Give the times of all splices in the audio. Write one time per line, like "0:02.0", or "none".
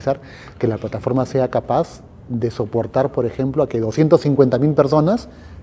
none